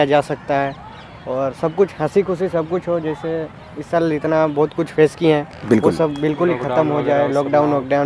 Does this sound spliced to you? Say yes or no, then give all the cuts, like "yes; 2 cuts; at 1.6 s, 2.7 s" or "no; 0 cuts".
no; 0 cuts